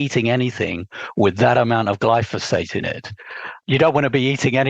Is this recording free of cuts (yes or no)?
no